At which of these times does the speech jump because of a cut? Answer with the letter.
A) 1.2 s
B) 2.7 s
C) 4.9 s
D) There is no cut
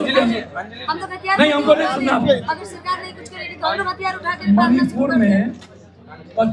D